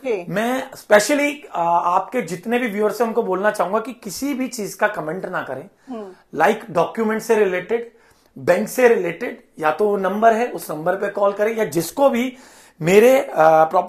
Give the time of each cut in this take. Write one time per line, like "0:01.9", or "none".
none